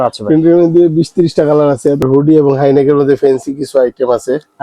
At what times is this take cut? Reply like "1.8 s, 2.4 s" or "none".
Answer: 2.0 s